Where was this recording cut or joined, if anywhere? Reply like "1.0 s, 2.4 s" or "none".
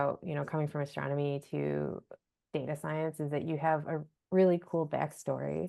none